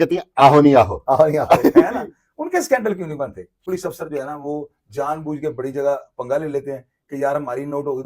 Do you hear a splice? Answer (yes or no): yes